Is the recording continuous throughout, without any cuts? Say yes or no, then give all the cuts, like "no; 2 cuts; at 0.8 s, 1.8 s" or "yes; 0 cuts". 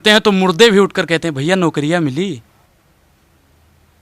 yes; 0 cuts